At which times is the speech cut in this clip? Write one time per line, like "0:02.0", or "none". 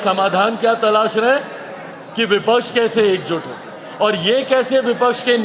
none